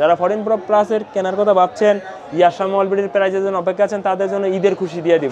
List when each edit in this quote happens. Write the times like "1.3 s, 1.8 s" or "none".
none